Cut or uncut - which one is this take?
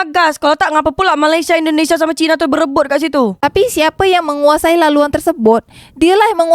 uncut